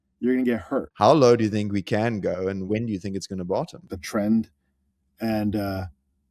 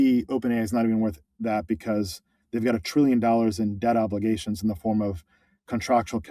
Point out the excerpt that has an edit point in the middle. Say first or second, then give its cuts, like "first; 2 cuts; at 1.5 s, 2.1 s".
first; 3 cuts; at 0.9 s, 2.6 s, 4.0 s